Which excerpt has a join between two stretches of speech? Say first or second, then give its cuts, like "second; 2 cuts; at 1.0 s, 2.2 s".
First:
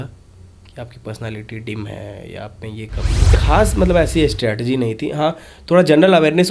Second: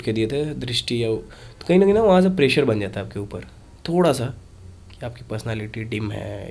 first; 1 cut; at 3.4 s